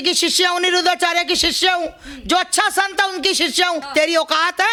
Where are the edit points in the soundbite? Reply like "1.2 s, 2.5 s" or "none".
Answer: none

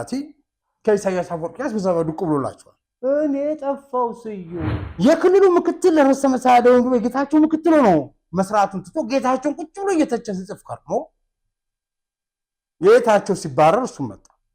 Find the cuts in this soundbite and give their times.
4.8 s

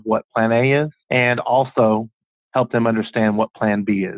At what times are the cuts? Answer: 1.0 s

